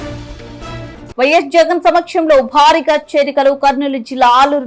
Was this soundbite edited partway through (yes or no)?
yes